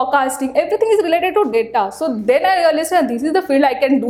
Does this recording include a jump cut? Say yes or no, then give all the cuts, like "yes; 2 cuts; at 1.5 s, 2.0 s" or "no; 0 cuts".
no; 0 cuts